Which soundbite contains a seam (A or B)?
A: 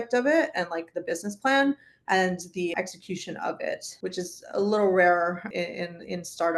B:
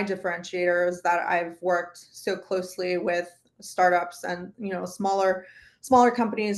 A